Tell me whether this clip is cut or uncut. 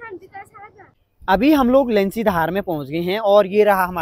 cut